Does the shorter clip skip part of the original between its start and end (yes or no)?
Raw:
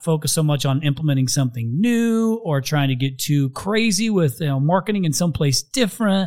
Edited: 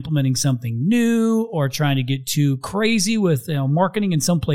no